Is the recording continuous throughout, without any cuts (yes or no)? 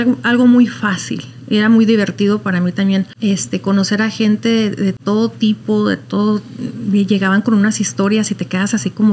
no